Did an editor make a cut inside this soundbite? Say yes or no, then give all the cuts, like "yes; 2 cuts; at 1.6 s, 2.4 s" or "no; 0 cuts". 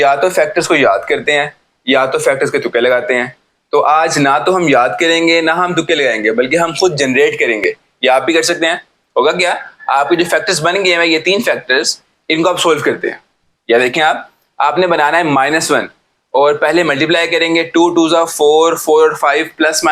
no; 0 cuts